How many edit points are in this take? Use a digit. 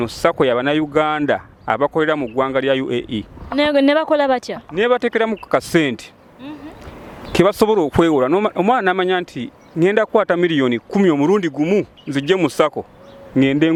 0